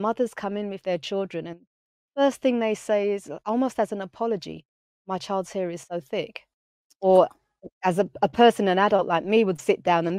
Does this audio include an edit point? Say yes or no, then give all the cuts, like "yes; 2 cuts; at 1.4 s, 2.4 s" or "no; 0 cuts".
no; 0 cuts